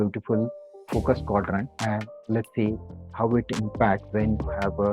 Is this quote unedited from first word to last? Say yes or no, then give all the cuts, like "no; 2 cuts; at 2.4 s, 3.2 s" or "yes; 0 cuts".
yes; 0 cuts